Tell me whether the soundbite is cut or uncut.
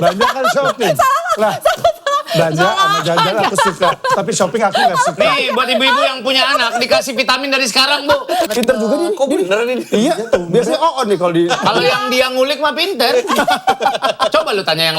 cut